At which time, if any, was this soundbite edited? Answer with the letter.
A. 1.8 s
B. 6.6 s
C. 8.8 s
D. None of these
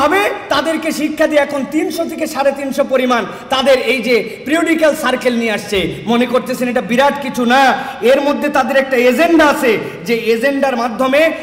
D